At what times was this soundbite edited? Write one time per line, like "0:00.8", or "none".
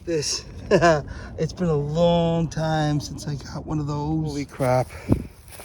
0:04.5